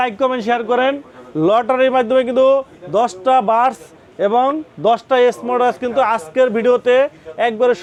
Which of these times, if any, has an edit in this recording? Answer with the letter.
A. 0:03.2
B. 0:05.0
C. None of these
C